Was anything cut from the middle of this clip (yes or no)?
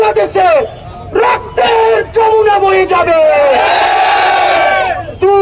no